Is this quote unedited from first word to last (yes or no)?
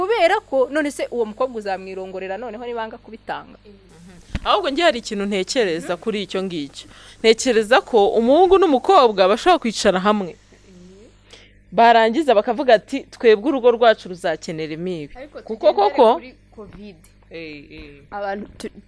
yes